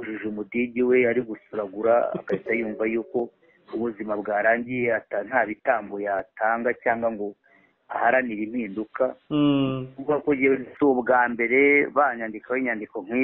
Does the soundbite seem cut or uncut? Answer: cut